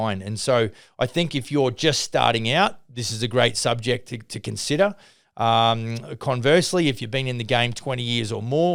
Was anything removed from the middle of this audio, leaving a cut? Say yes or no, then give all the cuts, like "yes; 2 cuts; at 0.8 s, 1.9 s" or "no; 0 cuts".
no; 0 cuts